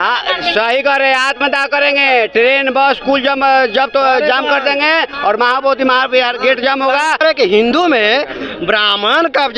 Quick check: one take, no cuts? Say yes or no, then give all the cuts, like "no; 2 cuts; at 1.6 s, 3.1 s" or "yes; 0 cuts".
no; 1 cut; at 7.2 s